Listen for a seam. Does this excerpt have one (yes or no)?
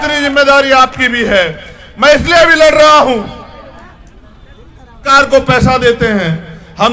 yes